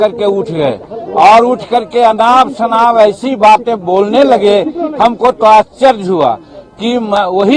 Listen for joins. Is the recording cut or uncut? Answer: uncut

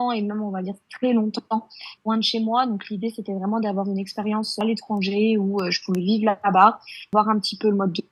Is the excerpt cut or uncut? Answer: cut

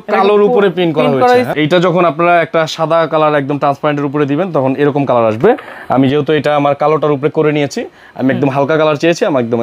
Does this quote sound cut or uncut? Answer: cut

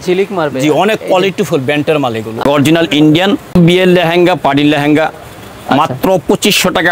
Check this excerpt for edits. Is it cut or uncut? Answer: cut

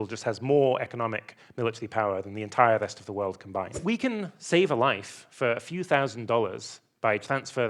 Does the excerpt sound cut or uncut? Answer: cut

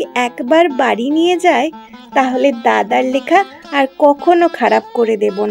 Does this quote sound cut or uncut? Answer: uncut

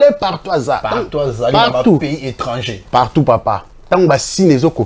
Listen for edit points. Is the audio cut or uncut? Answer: uncut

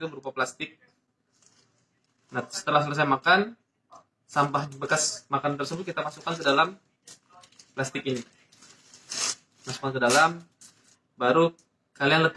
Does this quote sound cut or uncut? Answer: uncut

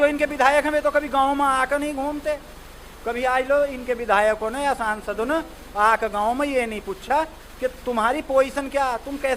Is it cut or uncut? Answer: uncut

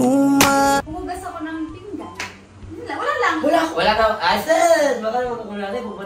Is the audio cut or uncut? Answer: cut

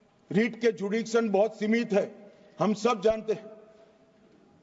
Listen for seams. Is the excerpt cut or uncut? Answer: uncut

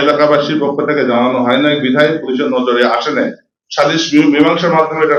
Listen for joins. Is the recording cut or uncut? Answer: uncut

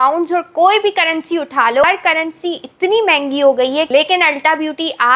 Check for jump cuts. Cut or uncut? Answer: cut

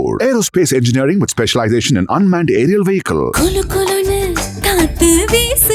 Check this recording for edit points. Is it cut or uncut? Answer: uncut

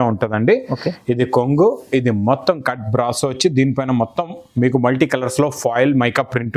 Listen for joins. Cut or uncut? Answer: uncut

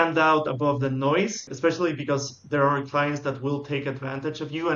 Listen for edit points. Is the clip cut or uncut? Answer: cut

